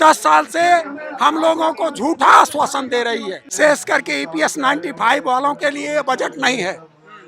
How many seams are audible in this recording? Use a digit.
1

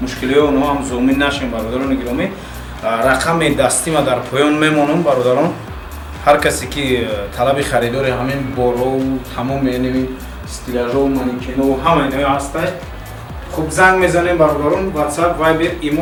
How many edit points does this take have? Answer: 0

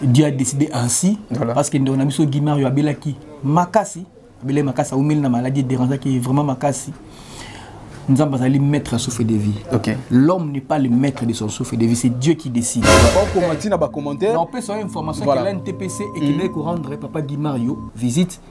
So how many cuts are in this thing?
1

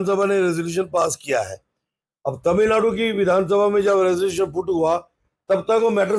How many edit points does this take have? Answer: 0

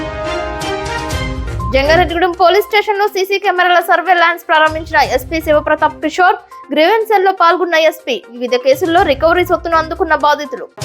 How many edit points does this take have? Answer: 1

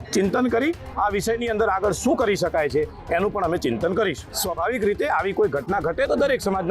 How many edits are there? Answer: 1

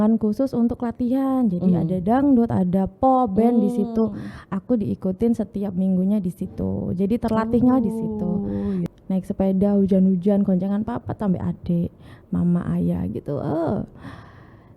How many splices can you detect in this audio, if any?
1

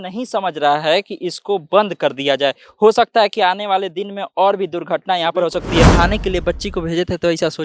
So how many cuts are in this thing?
1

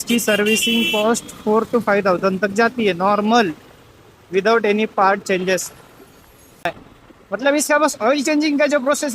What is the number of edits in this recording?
1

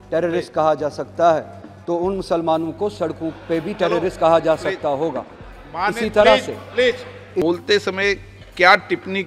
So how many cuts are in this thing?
1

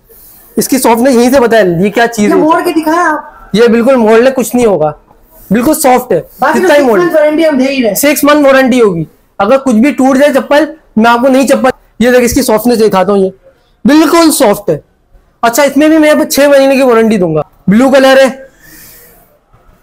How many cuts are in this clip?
2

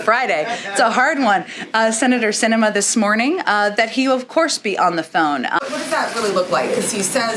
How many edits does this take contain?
1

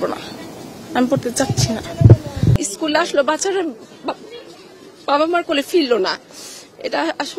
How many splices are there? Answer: 1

